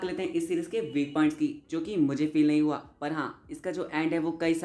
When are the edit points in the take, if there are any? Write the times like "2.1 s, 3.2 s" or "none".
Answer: none